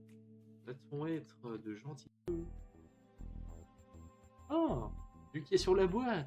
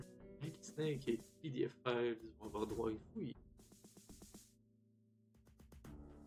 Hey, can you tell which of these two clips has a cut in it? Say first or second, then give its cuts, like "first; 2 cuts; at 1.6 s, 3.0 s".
first; 1 cut; at 2.3 s